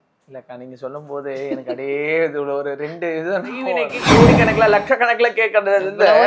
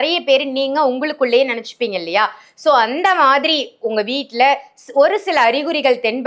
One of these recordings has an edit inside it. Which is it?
first; 1 cut; at 3.9 s

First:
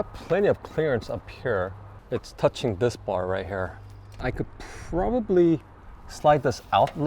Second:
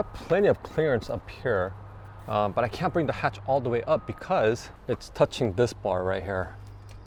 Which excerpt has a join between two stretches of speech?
first; 2 cuts; at 1.9 s, 4.2 s

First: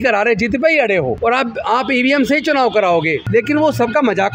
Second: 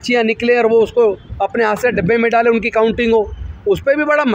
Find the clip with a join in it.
first; 2 cuts; at 1.2 s, 3.2 s

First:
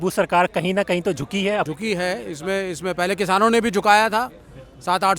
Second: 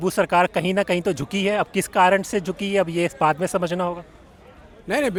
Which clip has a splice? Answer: first; 1 cut; at 1.7 s

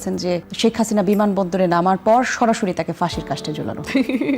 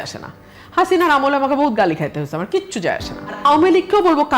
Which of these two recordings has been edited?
second; 1 cut; at 3.4 s

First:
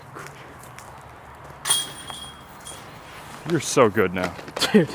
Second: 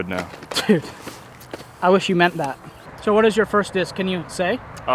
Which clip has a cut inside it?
second; 1 cut; at 2.9 s

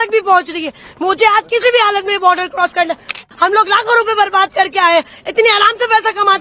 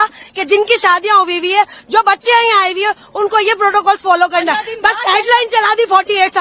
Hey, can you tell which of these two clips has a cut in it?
first; 1 cut; at 3.2 s

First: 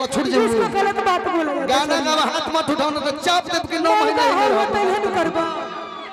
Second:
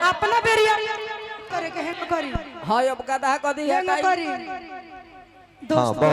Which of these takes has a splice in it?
second; 1 cut; at 1.4 s

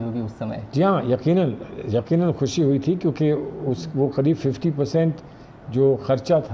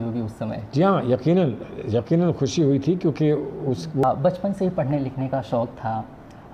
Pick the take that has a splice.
second; 1 cut; at 4.0 s

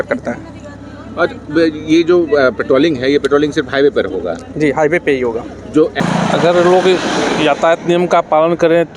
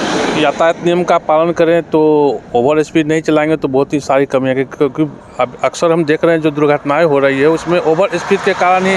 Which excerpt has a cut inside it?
first; 1 cut; at 6.0 s

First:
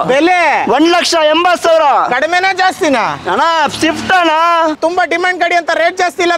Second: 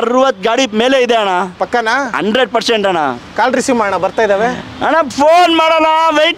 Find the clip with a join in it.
first; 1 cut; at 4.8 s

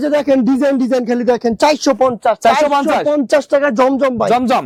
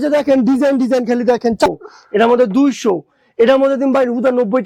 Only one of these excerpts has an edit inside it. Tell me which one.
second; 1 cut; at 1.7 s

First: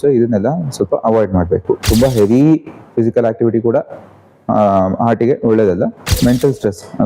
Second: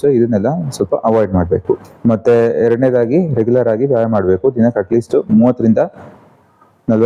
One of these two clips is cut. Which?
first; 2 cuts; at 1.8 s, 6.1 s

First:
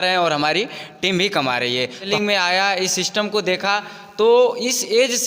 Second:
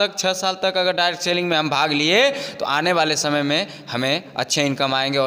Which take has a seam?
first; 1 cut; at 2.1 s

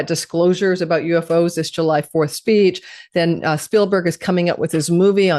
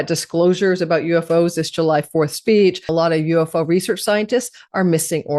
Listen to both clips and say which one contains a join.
second; 1 cut; at 2.9 s

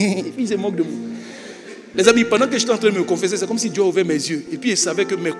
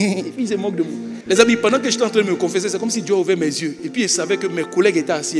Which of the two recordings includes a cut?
second; 1 cut; at 1.1 s

